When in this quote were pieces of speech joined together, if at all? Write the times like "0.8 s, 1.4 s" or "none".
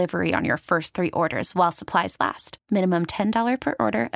none